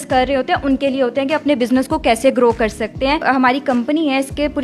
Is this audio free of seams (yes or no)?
no